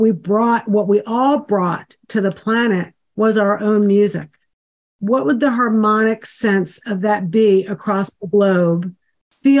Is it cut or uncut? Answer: uncut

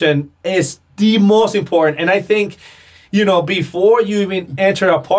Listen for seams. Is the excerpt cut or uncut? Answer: uncut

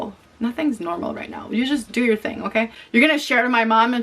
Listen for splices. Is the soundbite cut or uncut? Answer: cut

